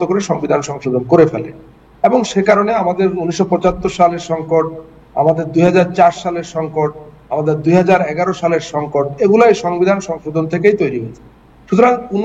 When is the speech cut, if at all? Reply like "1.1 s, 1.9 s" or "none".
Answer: none